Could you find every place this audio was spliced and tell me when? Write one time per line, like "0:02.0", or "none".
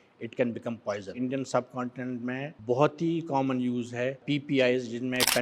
0:01.1
0:02.5
0:04.2